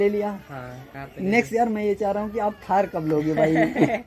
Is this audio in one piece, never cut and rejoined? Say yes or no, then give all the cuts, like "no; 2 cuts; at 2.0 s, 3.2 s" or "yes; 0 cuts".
yes; 0 cuts